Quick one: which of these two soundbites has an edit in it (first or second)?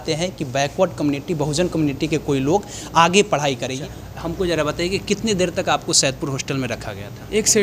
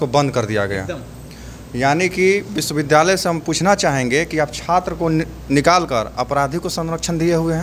first